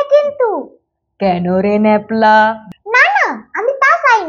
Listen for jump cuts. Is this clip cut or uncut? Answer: cut